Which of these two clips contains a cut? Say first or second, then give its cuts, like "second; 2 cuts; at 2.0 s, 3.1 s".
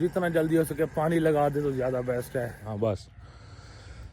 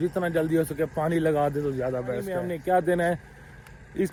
first; 1 cut; at 2.4 s